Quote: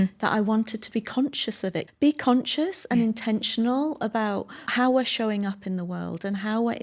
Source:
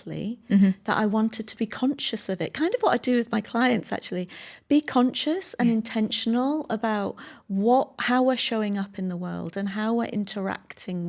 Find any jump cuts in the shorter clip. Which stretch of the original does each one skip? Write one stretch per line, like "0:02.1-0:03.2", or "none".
0:02.5-0:04.5
0:07.3-0:08.0